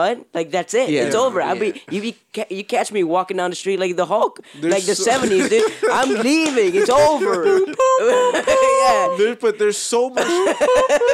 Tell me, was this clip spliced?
no; 0 cuts

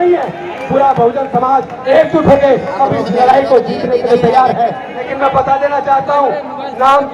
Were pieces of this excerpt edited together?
yes; 1 cut; at 4.9 s

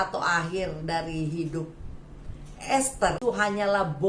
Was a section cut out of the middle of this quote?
yes; 1 cut; at 3.2 s

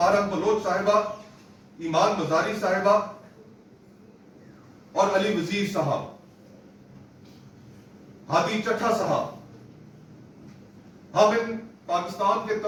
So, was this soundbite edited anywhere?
no; 0 cuts

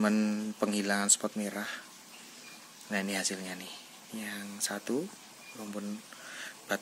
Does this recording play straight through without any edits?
yes; 0 cuts

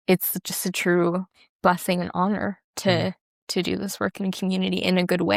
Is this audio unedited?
yes; 0 cuts

